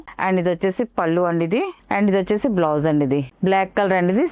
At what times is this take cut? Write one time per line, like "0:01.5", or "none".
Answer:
0:03.3

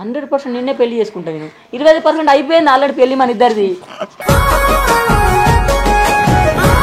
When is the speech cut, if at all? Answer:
none

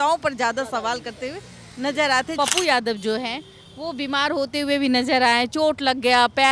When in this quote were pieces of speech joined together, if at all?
0:02.3

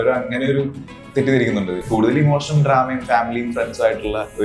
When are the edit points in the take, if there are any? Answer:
0:01.8

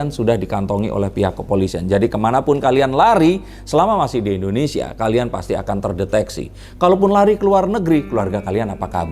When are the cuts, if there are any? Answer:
none

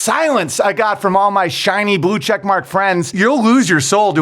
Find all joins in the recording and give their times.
0:03.1

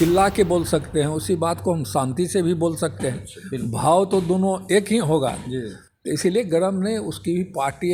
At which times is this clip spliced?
none

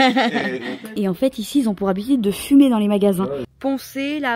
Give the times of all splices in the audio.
0:00.9
0:03.5

